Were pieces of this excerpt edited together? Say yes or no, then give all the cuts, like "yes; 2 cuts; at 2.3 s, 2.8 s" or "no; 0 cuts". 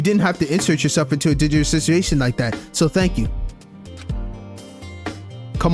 yes; 1 cut; at 3.9 s